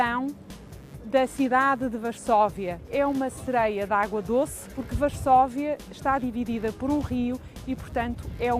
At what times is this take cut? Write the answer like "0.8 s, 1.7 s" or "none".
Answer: none